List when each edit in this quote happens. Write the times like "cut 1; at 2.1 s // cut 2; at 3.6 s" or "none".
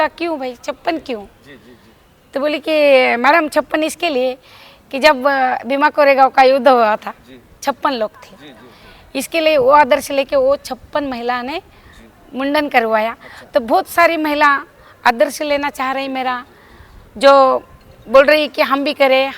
none